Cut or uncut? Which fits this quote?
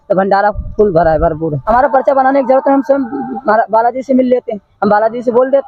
cut